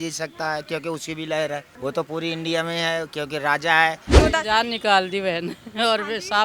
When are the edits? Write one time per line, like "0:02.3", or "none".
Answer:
0:01.7
0:04.2